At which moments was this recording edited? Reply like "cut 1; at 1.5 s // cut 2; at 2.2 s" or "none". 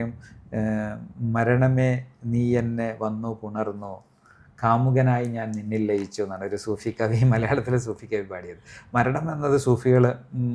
none